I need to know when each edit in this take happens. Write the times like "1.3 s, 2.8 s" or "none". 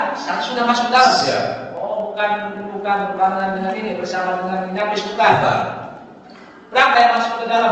none